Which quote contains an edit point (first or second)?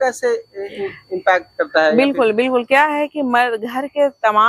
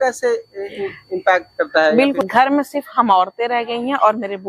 second